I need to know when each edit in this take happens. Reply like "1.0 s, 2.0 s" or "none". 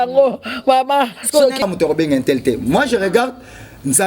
1.6 s